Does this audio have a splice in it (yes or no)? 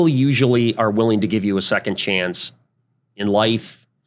no